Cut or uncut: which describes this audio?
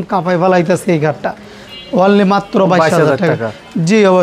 uncut